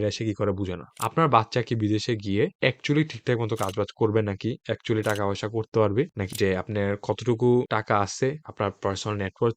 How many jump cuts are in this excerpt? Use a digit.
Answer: 2